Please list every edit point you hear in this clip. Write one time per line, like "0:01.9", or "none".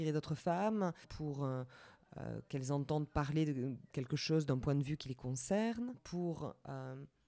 0:01.1
0:06.0